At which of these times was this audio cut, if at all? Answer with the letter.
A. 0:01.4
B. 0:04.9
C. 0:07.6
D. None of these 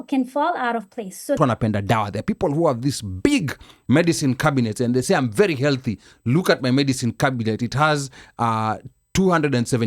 A